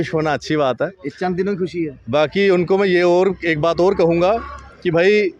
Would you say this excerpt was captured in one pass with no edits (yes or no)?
yes